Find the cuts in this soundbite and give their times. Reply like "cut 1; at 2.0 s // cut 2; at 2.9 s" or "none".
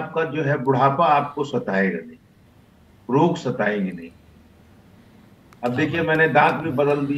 none